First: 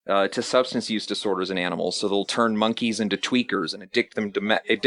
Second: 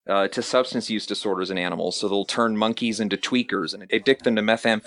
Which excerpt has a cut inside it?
second; 1 cut; at 3.9 s

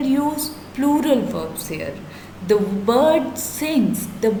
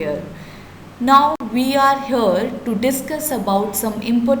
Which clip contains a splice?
second; 1 cut; at 1.4 s

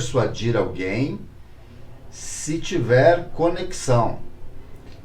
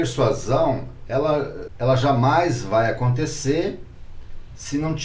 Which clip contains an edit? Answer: second; 1 cut; at 1.6 s

